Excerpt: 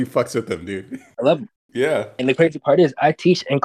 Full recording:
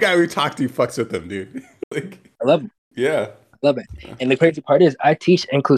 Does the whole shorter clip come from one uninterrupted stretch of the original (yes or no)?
no